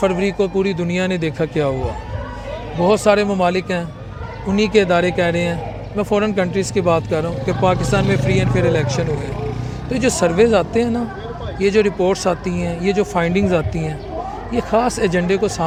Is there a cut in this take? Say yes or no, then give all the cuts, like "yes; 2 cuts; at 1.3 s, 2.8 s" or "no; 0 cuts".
no; 0 cuts